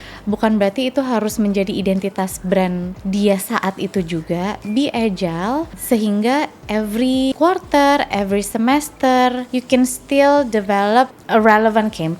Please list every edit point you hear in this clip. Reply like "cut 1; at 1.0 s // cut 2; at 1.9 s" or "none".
cut 1; at 2.9 s // cut 2; at 5.8 s // cut 3; at 7.3 s // cut 4; at 9.5 s // cut 5; at 11.2 s